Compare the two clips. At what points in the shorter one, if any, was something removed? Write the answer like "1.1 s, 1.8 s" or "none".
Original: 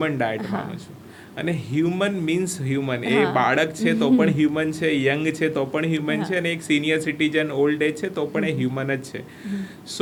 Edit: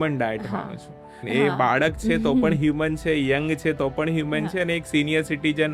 1.2 s